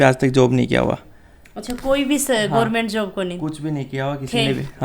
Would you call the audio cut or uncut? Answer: uncut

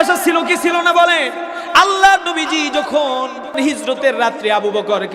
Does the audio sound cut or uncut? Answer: cut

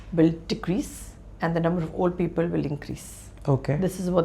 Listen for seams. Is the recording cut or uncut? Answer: uncut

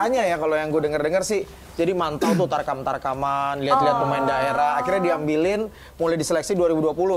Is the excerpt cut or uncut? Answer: uncut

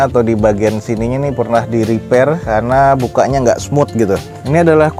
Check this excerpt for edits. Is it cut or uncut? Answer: uncut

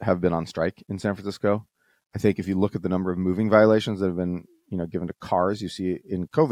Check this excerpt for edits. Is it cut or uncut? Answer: uncut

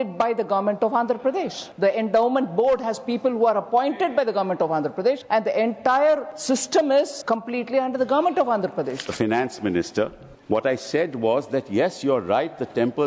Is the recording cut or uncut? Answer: cut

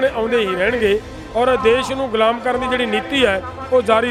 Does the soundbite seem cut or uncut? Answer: uncut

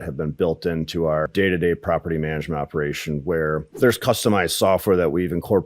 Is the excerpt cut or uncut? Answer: cut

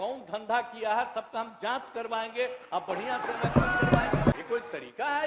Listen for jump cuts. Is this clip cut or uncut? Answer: cut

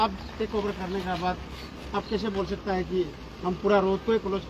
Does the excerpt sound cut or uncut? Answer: uncut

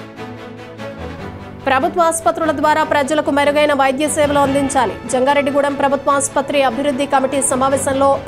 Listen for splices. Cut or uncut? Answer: uncut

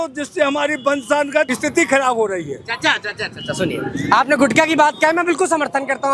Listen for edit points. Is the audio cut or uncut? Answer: cut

